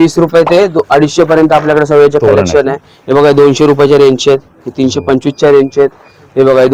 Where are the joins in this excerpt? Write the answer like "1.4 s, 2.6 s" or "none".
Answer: none